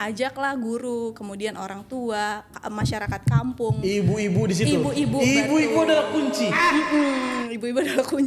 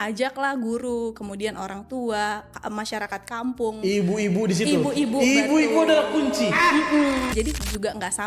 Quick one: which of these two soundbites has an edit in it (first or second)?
second